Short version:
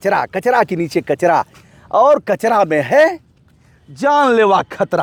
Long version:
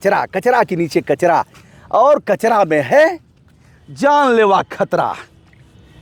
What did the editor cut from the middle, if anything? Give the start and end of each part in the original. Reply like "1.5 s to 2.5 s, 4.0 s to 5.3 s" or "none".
none